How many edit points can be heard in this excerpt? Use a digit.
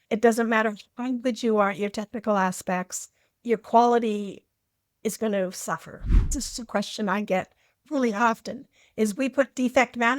1